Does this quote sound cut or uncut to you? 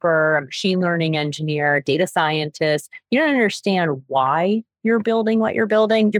uncut